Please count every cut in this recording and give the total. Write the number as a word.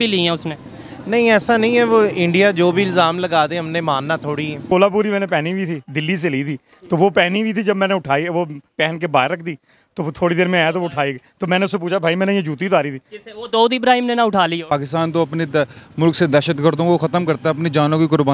two